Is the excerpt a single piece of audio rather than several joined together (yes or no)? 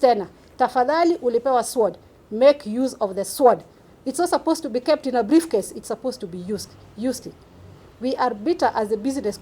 yes